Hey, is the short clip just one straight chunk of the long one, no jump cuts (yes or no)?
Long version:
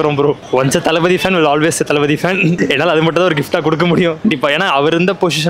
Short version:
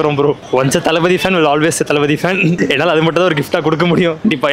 yes